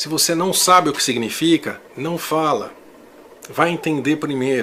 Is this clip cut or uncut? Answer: uncut